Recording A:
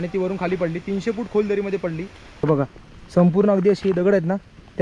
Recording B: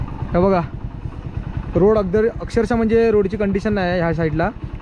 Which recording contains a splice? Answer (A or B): A